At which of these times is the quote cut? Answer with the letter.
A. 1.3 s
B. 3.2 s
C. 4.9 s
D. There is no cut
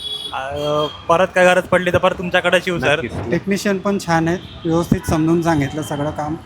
B